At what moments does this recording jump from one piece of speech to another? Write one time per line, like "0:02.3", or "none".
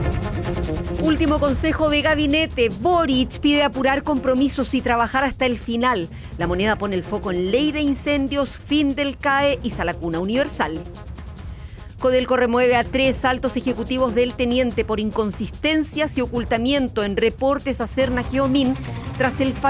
0:01.0